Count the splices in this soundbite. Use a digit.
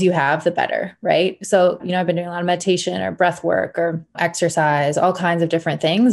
2